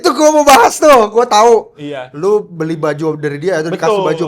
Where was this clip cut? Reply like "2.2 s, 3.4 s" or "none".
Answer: none

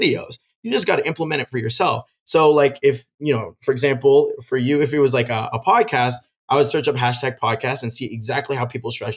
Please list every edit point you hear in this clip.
none

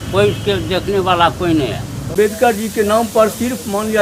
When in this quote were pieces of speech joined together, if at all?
2.1 s

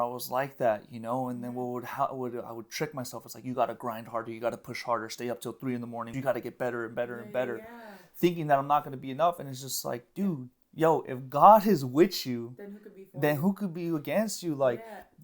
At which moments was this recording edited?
6.1 s

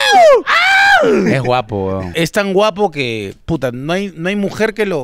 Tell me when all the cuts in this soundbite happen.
2.0 s

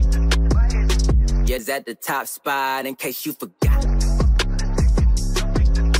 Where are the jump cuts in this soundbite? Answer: none

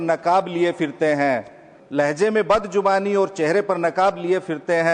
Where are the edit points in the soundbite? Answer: none

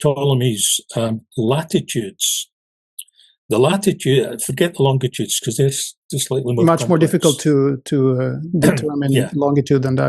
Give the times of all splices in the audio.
none

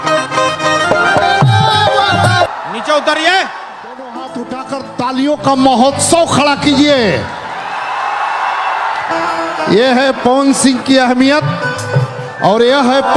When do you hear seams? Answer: 4.2 s

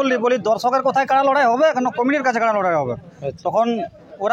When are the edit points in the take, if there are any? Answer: none

